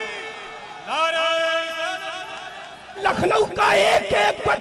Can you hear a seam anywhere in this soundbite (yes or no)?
yes